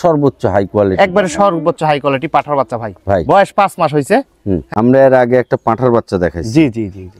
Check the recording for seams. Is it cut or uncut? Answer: cut